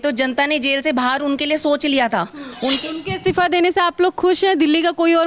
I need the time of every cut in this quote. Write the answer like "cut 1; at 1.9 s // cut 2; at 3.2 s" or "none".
cut 1; at 2.8 s